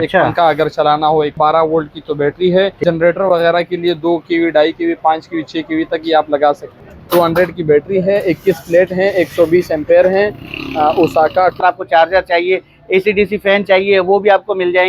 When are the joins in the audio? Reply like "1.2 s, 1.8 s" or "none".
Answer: 1.3 s, 2.8 s, 6.7 s, 11.6 s

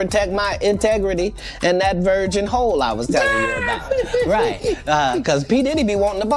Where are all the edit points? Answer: 4.6 s

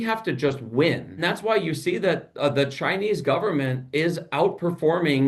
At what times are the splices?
1.2 s

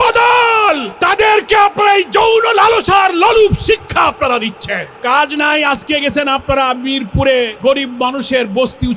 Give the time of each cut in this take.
0.9 s, 4.9 s, 7.5 s

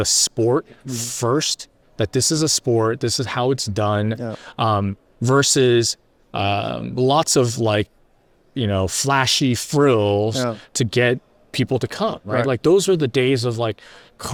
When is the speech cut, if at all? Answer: none

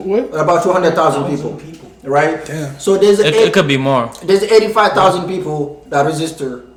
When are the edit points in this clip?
none

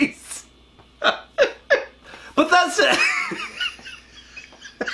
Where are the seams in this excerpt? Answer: 2.0 s

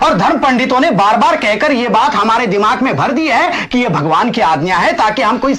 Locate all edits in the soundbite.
none

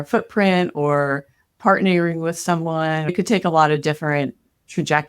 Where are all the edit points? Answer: 3.1 s

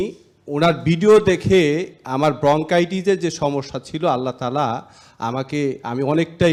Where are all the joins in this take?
none

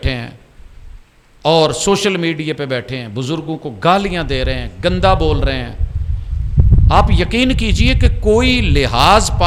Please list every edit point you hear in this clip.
none

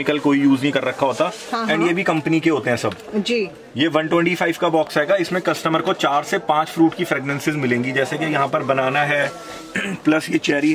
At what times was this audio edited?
none

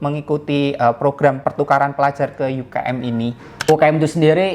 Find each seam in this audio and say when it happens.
1.4 s, 3.5 s

